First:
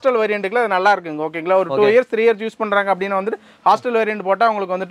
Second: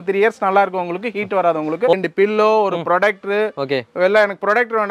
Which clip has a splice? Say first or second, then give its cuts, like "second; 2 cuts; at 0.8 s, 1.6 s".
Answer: second; 1 cut; at 1.9 s